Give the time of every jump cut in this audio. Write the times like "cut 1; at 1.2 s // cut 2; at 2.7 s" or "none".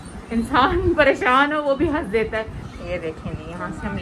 cut 1; at 2.6 s